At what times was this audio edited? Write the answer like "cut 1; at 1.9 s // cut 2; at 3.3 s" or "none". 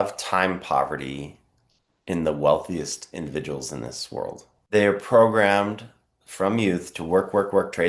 cut 1; at 4.6 s